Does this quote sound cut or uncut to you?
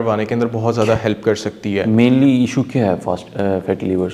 uncut